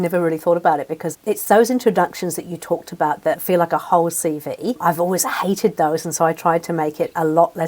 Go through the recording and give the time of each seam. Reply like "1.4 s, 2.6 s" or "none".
1.1 s, 3.4 s, 4.8 s

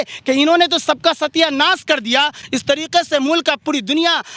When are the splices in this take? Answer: none

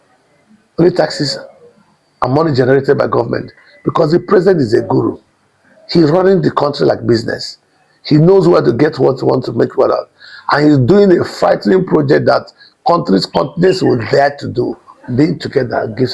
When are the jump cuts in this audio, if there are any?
14.9 s

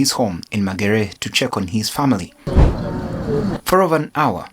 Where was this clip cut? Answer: 2.5 s

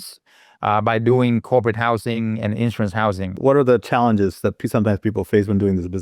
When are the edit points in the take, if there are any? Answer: 3.3 s

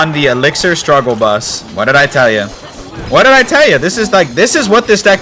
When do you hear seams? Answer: 1.6 s

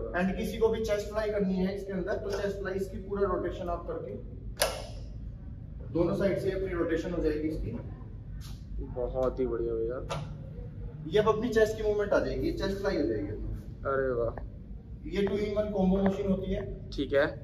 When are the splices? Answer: none

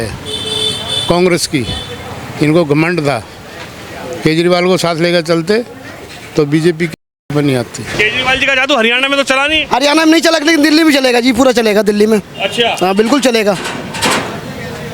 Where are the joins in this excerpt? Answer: 7.8 s

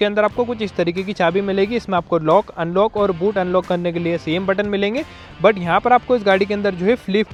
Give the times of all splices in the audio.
none

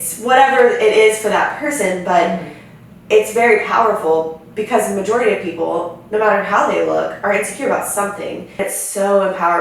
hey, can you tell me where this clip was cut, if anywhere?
8.6 s

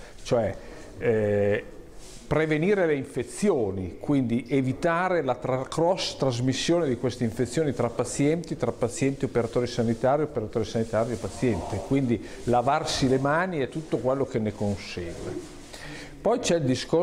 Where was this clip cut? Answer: none

